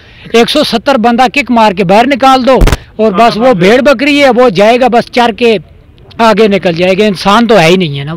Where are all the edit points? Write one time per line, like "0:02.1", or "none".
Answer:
none